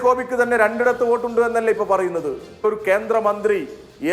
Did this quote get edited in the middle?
yes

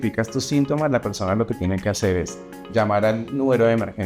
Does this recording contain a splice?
no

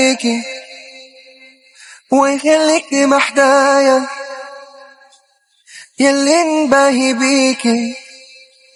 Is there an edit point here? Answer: no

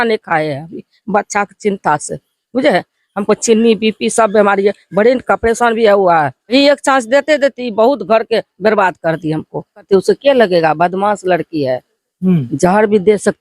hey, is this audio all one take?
no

